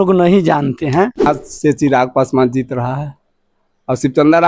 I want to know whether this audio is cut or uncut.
cut